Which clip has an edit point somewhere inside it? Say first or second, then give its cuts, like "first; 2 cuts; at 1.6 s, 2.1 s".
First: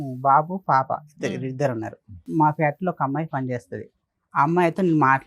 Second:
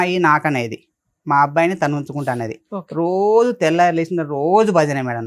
first; 1 cut; at 2.3 s